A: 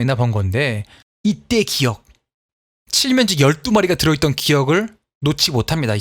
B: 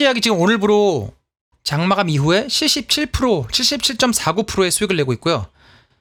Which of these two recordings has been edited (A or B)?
A